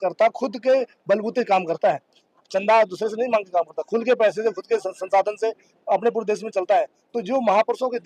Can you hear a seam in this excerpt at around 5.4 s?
no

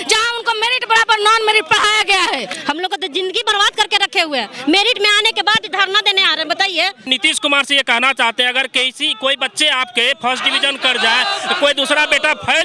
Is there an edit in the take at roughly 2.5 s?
yes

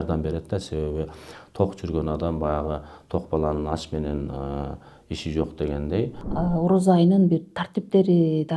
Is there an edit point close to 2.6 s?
no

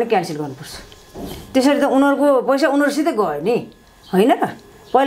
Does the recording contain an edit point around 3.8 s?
no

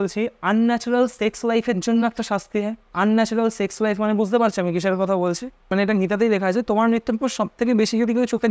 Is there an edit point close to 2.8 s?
yes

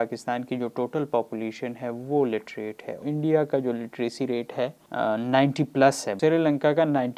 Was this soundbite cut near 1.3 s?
no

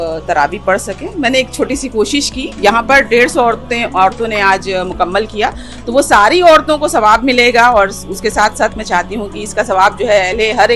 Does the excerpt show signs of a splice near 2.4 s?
yes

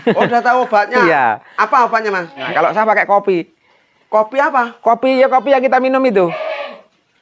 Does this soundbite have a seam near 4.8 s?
no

